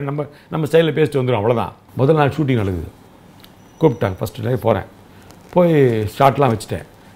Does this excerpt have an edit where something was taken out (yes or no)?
yes